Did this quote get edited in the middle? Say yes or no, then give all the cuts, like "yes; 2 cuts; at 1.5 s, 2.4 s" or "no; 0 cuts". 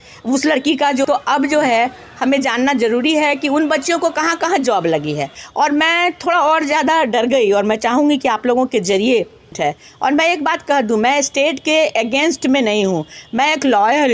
yes; 3 cuts; at 1.0 s, 5.4 s, 9.5 s